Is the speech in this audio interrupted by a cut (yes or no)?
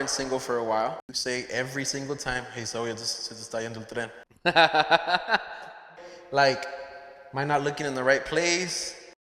yes